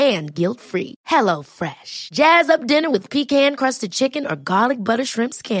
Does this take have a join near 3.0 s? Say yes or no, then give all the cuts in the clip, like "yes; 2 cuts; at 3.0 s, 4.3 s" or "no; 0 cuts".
no; 0 cuts